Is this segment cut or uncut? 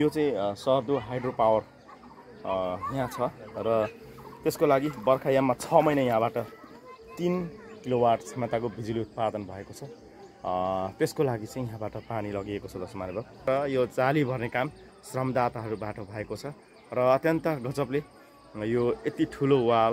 cut